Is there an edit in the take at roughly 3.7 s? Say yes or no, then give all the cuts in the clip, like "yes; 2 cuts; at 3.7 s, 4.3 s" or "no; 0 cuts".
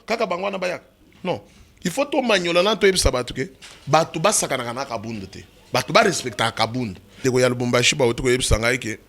no; 1 cut; at 7.2 s